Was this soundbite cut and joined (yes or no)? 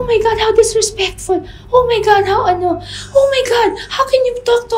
no